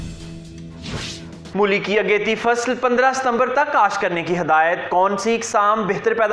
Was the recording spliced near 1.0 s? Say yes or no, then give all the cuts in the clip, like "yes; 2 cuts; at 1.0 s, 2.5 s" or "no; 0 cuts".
yes; 1 cut; at 1.0 s